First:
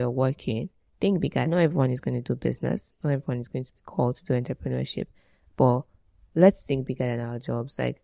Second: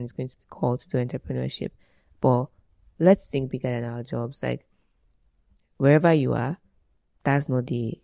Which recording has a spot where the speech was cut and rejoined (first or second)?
first